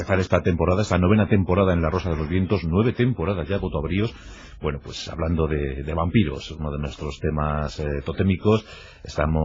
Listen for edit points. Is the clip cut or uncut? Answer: uncut